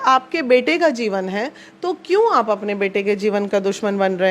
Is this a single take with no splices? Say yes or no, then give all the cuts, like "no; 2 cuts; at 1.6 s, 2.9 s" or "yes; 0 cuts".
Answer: yes; 0 cuts